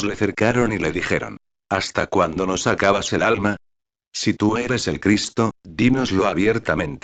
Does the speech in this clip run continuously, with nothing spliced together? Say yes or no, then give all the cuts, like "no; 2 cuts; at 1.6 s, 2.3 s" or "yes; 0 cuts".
yes; 0 cuts